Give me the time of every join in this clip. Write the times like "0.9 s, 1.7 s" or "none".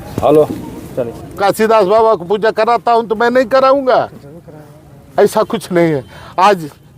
1.4 s

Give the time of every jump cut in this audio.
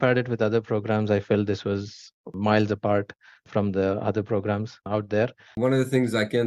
5.5 s

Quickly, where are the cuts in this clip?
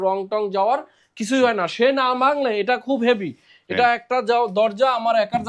none

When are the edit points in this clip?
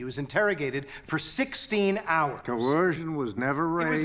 2.4 s

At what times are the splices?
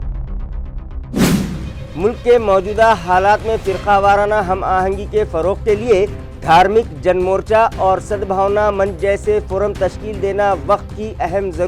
1.7 s

